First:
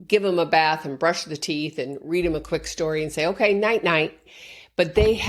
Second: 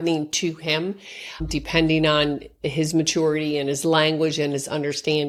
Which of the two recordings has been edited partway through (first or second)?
first